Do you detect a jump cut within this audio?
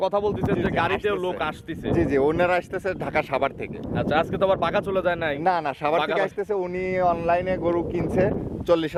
no; 0 cuts

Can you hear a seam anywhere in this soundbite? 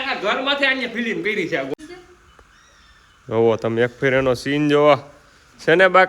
yes; 1 cut; at 1.7 s

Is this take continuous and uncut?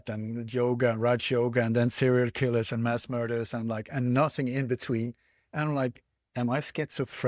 yes; 0 cuts

